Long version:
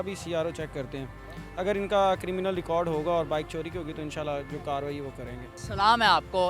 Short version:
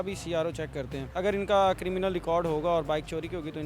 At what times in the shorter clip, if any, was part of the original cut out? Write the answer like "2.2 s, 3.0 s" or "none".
1.0 s